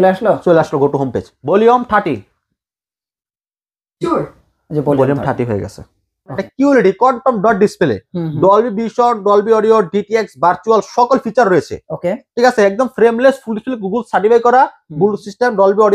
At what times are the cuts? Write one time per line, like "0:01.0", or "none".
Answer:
0:01.3
0:06.1